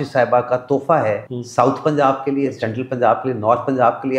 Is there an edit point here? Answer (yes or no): yes